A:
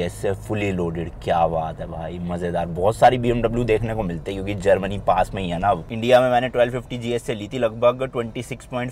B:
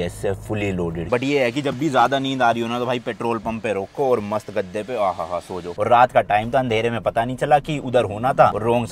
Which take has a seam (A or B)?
B